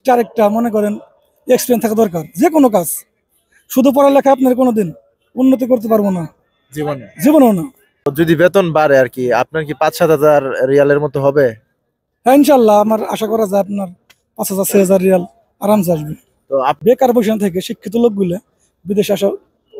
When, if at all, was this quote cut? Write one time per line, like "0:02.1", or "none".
0:08.1
0:16.8

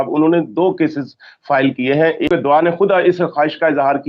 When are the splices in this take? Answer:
0:02.3

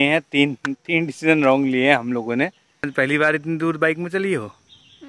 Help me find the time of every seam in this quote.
0:02.9

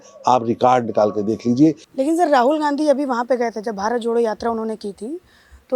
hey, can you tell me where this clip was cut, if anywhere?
0:01.9

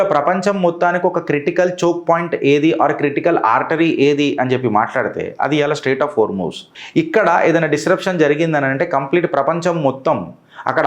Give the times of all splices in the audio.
none

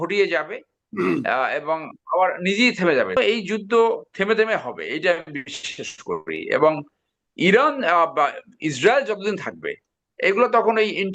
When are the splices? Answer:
0:03.2

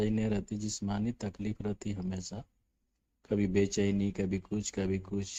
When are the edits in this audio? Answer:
none

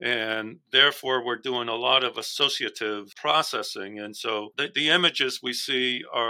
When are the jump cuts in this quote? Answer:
0:03.1
0:04.5

